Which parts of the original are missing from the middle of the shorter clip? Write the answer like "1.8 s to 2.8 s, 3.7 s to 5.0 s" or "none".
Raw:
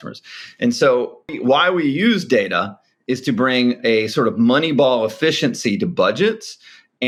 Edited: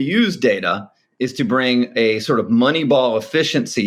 none